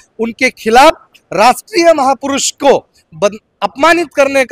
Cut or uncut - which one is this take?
uncut